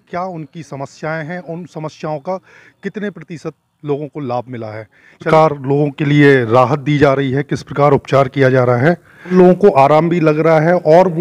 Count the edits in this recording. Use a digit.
2